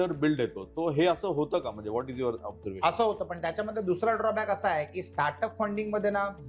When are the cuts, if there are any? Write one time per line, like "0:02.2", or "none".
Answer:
none